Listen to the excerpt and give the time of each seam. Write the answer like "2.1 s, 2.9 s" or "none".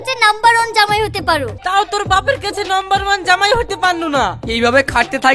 1.6 s